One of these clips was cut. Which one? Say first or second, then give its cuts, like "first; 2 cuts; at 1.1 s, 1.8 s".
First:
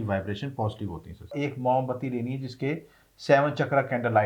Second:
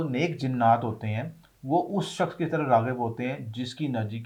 first; 1 cut; at 1.3 s